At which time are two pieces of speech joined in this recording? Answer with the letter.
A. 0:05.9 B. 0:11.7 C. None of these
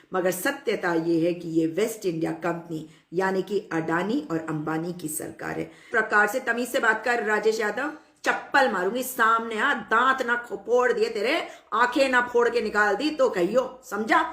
A